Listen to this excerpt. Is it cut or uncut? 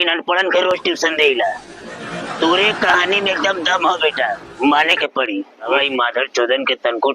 cut